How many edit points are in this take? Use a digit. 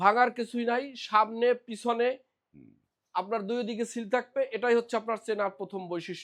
0